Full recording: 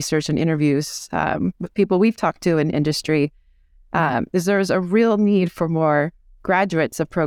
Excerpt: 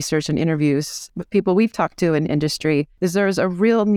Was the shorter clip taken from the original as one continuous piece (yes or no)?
no